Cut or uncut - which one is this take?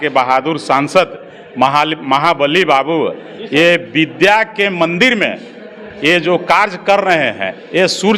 uncut